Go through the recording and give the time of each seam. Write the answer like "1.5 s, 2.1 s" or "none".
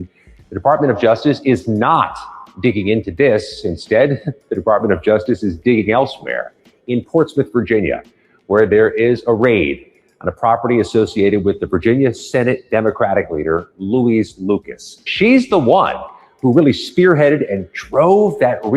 15.1 s